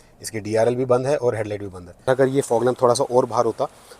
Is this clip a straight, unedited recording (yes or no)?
no